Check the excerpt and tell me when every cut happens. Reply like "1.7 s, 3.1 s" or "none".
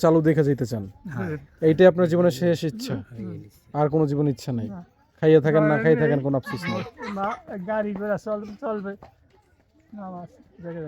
none